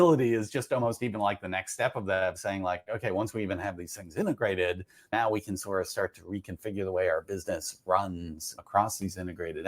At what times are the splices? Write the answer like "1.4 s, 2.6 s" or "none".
5.1 s, 8.5 s